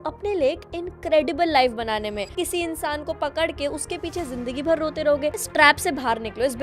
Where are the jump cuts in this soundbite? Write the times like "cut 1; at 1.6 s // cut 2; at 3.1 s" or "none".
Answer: cut 1; at 2.3 s // cut 2; at 5.5 s